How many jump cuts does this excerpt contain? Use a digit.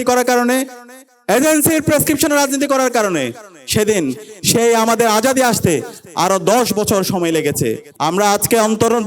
1